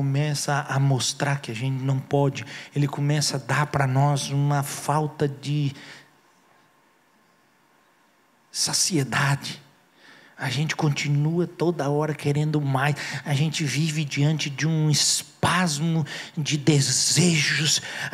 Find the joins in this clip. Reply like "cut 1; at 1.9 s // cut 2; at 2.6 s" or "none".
none